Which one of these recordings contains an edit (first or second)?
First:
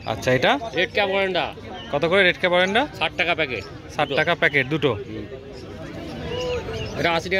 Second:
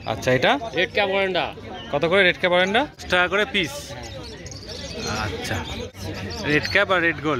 second